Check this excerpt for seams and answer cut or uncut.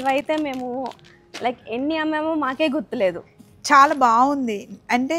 uncut